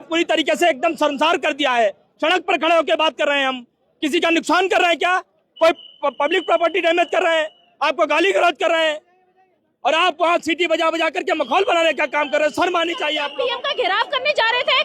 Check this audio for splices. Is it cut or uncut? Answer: cut